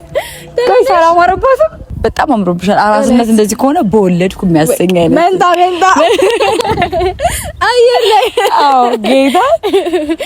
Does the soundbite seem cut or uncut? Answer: cut